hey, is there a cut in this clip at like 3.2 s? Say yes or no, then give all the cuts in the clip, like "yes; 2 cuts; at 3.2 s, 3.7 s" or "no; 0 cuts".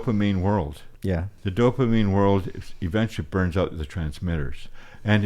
no; 1 cut; at 1.0 s